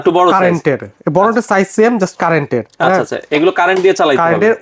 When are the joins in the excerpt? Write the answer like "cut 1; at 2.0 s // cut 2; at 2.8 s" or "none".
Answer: none